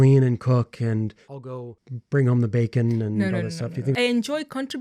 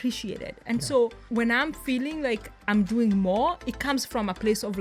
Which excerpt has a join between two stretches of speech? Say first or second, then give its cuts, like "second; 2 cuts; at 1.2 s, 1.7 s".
first; 2 cuts; at 1.5 s, 3.9 s